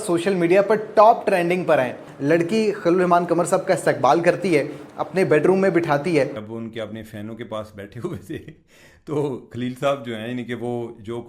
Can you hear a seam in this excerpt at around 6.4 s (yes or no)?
yes